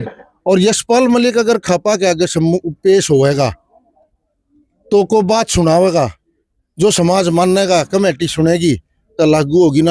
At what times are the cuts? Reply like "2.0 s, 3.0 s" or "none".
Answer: none

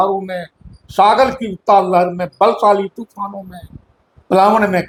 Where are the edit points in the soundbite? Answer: none

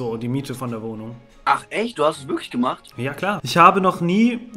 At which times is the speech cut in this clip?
3.4 s

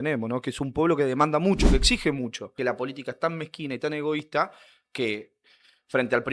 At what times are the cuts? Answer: 2.5 s

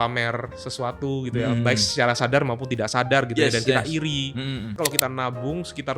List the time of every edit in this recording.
4.8 s

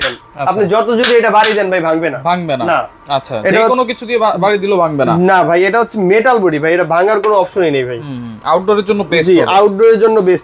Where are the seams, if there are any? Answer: none

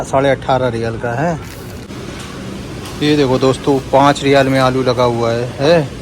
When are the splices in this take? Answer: 1.9 s

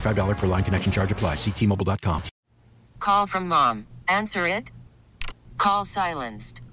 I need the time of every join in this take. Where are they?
2.4 s

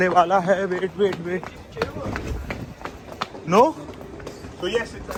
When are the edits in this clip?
none

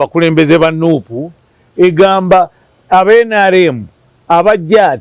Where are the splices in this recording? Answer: none

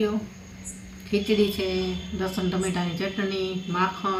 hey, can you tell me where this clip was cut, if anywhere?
none

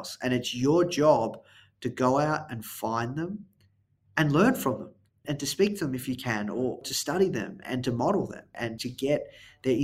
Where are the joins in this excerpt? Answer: 5.2 s, 6.8 s, 7.6 s, 8.6 s

